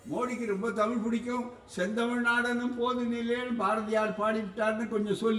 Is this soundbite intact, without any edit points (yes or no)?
yes